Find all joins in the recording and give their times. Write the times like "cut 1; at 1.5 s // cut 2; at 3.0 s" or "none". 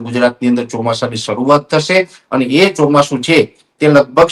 none